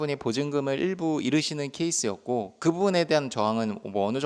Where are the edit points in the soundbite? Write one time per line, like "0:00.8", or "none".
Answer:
none